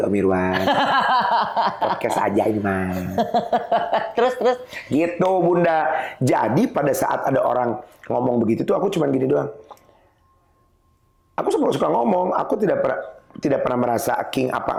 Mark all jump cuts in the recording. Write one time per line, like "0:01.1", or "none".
none